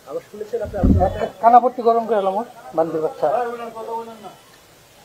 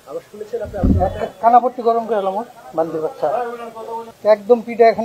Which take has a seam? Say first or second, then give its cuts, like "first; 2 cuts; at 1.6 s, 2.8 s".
second; 1 cut; at 4.1 s